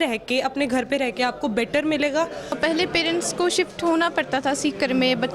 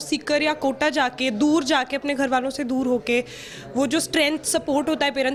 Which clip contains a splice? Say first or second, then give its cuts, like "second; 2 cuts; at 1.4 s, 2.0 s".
first; 1 cut; at 2.6 s